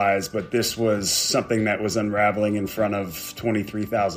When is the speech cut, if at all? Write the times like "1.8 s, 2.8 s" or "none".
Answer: none